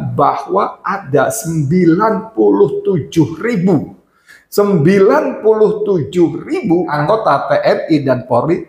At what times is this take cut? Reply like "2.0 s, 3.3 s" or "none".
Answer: 7.0 s